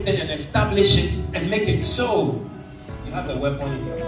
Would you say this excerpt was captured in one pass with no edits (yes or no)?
no